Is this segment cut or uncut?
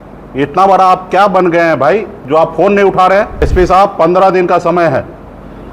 cut